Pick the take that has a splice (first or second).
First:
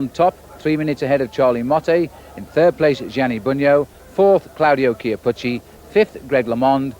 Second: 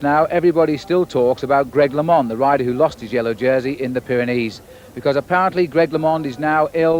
first